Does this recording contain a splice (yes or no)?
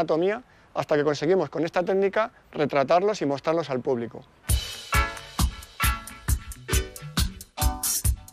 no